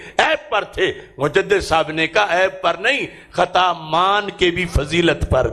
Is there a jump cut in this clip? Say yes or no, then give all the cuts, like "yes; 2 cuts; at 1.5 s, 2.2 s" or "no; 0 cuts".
no; 0 cuts